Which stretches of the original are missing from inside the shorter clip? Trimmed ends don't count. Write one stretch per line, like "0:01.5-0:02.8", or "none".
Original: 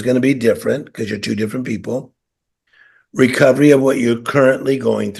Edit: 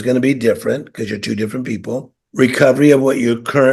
0:02.2-0:03.0